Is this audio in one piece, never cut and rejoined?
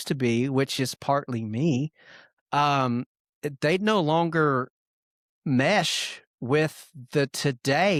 yes; 0 cuts

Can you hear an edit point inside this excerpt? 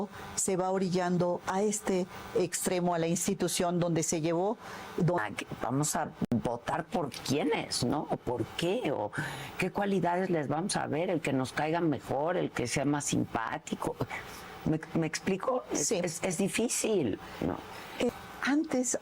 yes; 2 cuts; at 5.2 s, 18.1 s

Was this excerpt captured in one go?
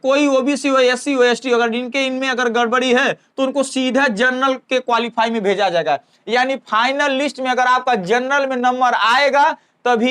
yes; 0 cuts

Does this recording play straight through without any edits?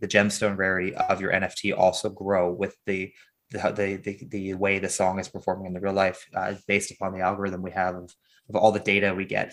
yes; 0 cuts

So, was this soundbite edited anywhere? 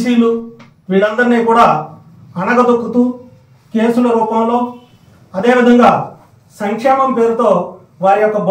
no; 0 cuts

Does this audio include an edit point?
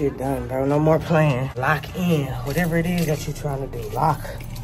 yes; 1 cut; at 1.5 s

